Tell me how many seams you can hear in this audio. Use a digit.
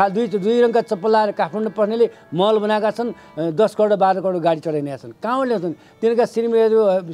0